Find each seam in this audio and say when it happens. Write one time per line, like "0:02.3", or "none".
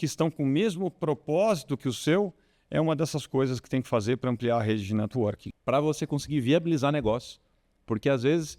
0:05.5